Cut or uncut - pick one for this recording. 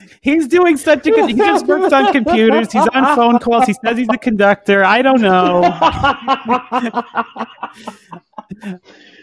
uncut